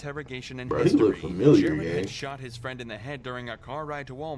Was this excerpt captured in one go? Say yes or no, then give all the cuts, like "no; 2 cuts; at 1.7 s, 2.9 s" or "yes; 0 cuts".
yes; 0 cuts